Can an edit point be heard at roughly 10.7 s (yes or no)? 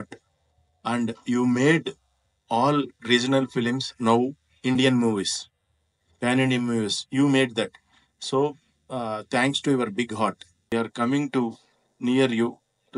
yes